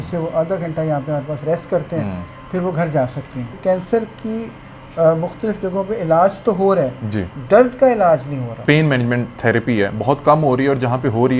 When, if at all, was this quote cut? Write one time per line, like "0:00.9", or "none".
0:03.6
0:08.5